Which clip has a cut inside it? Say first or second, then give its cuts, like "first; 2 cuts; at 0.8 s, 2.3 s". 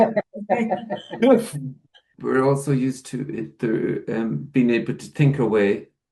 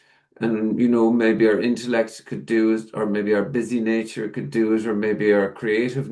first; 1 cut; at 2.1 s